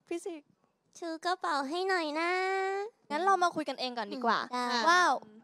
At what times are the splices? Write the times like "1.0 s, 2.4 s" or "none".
3.0 s